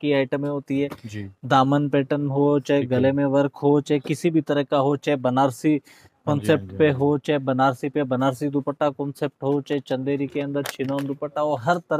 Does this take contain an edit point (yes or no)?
no